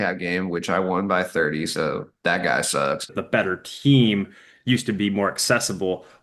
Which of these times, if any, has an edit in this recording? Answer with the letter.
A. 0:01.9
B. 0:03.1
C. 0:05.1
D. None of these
B